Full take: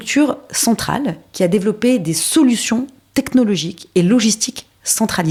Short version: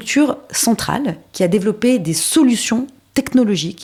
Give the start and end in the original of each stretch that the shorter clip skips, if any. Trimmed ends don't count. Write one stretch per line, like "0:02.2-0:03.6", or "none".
none